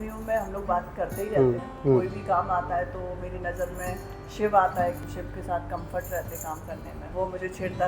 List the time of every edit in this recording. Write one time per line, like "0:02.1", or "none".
0:01.7
0:05.0
0:07.0

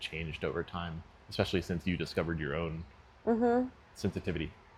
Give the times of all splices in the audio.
none

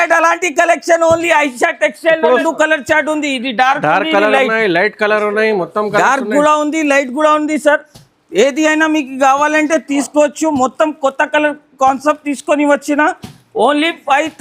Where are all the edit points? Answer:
0:02.4

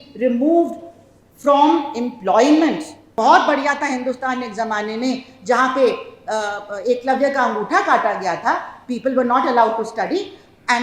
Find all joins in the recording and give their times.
0:03.0

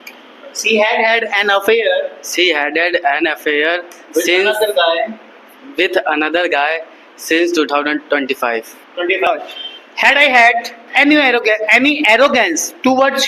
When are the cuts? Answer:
0:09.3

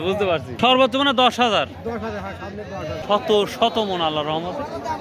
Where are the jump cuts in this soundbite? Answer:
0:03.0

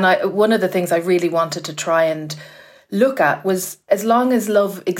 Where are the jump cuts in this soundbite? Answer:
0:03.7

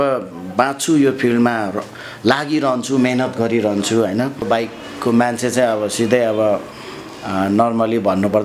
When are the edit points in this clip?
0:04.4

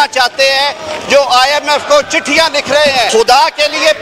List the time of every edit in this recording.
0:03.1

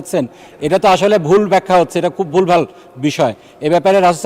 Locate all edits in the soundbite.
none

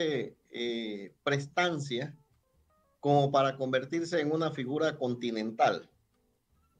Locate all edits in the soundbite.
none

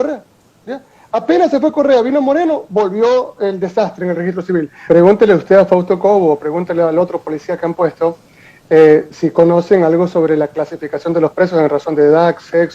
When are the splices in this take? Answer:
0:04.9

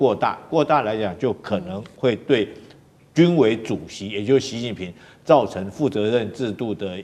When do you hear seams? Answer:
none

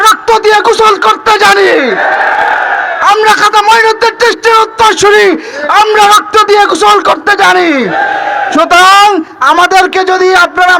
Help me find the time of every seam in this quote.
none

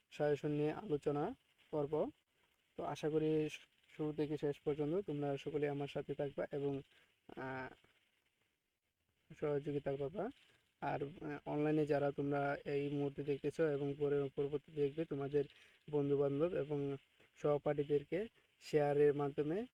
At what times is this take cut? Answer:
none

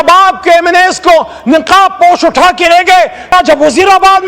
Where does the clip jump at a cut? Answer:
0:03.3

